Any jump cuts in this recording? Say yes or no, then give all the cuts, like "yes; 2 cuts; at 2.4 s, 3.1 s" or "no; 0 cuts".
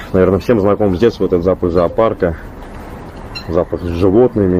no; 0 cuts